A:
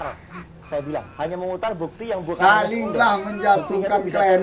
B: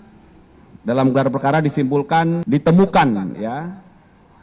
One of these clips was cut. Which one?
B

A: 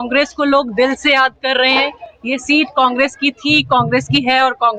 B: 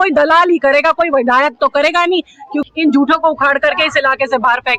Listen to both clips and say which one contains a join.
B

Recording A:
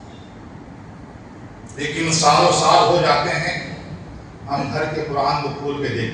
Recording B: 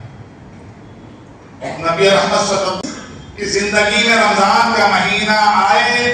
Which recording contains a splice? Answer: B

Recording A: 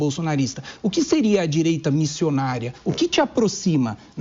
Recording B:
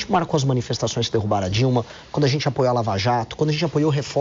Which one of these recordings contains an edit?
A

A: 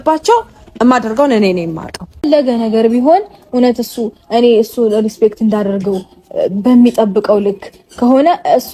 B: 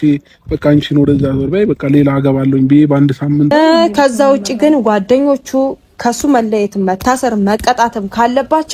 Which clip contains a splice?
B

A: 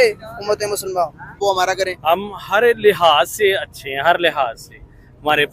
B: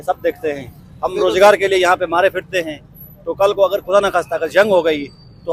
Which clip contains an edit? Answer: A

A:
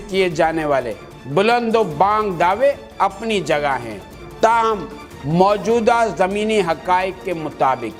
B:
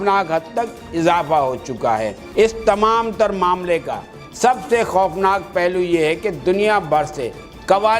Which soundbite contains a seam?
B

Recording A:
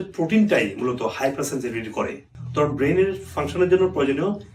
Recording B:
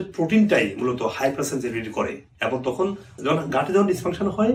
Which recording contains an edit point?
A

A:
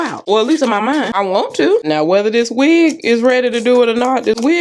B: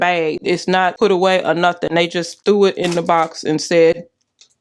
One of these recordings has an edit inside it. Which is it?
B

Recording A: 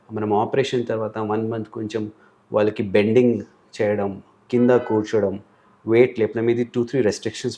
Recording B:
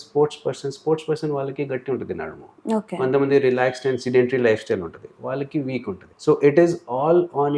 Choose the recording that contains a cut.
B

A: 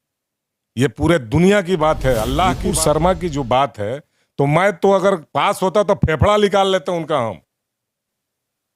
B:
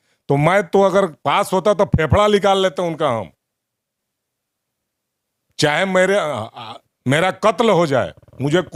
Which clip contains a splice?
A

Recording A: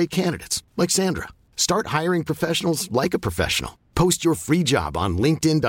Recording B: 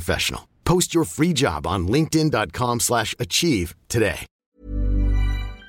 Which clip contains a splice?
B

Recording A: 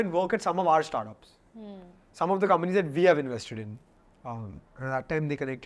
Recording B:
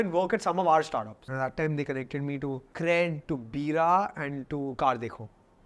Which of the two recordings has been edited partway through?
B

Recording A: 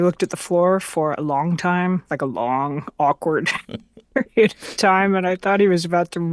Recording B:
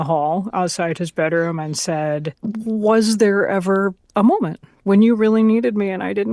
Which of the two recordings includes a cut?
B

